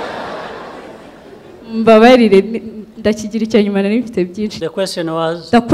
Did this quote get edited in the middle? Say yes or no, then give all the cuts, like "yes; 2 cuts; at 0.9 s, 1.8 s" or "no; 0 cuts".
yes; 1 cut; at 4.6 s